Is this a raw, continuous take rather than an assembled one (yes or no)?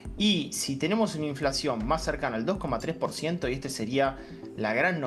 yes